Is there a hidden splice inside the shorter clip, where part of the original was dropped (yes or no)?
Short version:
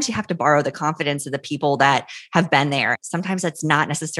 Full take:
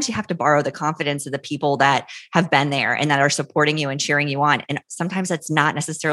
yes